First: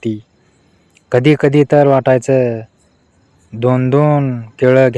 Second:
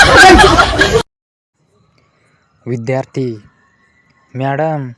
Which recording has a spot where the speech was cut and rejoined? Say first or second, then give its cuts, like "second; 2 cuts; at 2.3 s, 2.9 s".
second; 1 cut; at 1.2 s